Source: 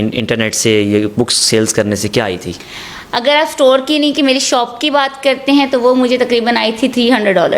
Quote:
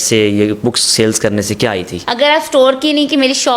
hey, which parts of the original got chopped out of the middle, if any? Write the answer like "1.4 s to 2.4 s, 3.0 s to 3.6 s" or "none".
2.5 s to 3.0 s